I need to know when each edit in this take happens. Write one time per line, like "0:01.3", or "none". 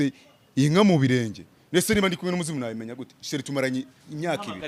none